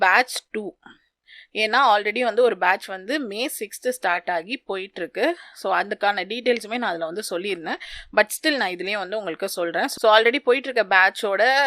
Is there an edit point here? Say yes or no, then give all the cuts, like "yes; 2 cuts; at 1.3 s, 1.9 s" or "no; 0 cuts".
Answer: no; 0 cuts